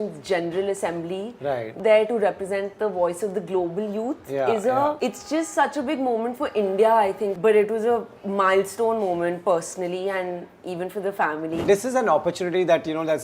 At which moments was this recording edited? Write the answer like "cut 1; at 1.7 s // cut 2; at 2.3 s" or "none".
cut 1; at 1.7 s // cut 2; at 5.0 s // cut 3; at 7.3 s // cut 4; at 11.6 s

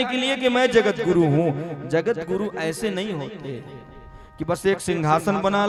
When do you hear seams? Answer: none

